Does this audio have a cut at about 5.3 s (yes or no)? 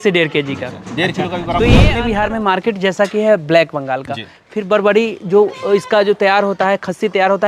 no